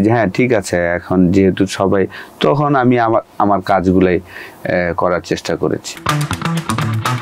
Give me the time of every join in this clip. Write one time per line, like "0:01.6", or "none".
0:05.9

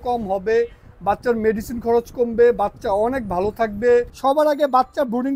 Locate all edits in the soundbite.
0:04.1

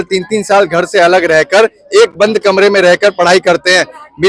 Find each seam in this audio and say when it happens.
none

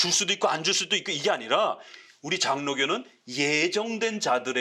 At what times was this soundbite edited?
none

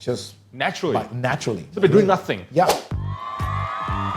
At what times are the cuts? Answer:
0:02.8

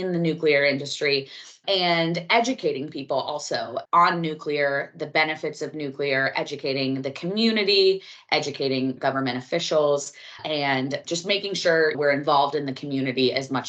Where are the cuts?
none

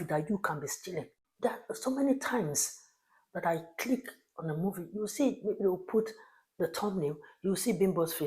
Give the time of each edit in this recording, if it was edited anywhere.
0:01.2

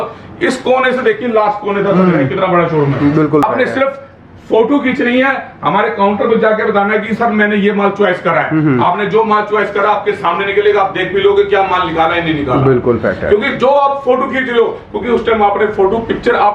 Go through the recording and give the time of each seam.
0:03.4

